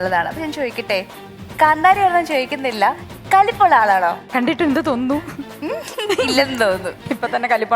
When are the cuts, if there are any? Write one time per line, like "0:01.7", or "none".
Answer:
0:04.3
0:05.6